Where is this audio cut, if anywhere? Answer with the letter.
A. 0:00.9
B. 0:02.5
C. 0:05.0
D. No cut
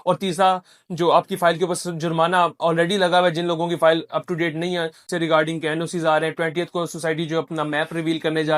C